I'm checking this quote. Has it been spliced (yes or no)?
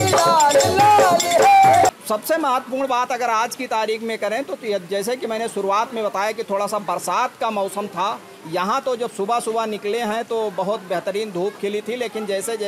yes